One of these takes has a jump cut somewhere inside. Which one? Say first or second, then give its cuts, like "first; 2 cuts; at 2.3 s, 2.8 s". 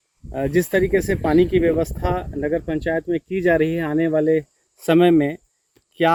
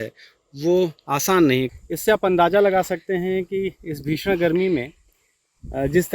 second; 1 cut; at 1.7 s